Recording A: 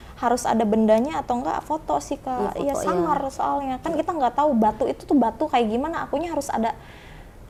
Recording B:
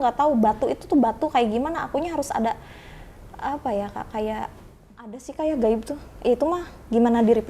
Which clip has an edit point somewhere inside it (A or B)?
B